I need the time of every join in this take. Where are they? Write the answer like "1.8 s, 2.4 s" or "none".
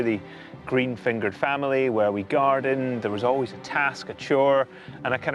3.6 s